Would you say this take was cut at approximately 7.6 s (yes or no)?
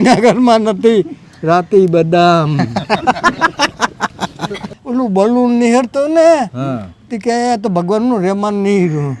no